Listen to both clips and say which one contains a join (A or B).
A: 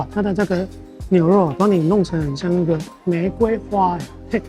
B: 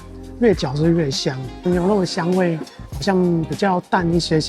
B